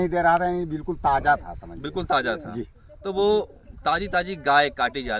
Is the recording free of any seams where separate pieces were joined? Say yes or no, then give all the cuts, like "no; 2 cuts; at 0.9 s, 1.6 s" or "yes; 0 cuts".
yes; 0 cuts